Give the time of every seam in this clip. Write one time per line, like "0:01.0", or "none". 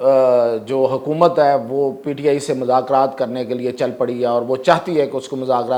none